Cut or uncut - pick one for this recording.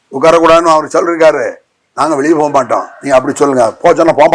uncut